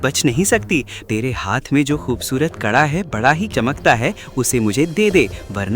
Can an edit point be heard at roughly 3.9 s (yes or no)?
no